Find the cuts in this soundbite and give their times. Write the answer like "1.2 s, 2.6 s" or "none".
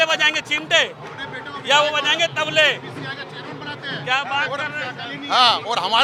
none